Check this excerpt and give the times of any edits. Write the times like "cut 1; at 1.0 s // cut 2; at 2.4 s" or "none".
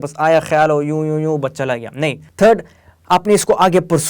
cut 1; at 2.2 s

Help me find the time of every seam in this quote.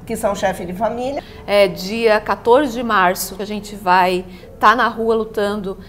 cut 1; at 1.3 s // cut 2; at 3.3 s

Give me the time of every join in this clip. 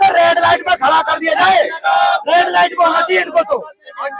none

